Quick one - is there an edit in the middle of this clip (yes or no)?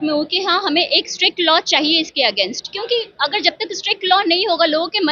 no